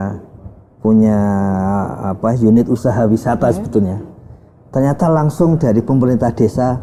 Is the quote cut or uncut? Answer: uncut